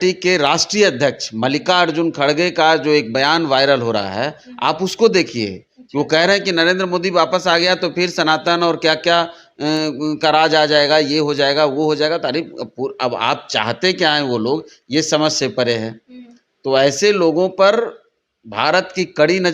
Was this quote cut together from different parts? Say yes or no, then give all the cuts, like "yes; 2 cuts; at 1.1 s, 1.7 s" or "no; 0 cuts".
no; 0 cuts